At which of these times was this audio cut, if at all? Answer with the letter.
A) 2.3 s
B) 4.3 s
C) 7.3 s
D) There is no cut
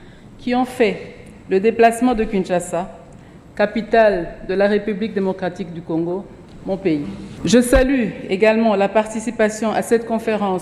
C